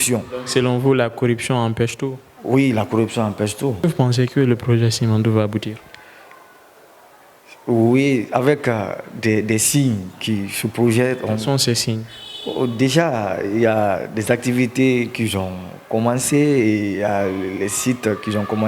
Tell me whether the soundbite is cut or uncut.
cut